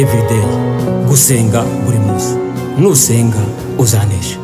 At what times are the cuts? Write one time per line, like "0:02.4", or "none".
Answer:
none